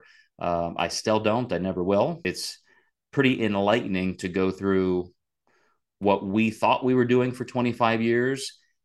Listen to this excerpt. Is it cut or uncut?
cut